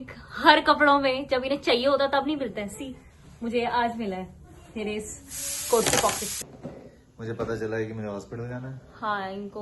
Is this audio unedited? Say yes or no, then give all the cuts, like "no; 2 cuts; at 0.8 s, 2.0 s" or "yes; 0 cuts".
no; 1 cut; at 6.3 s